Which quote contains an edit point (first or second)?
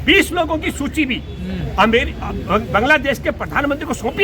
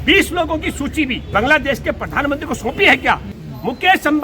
second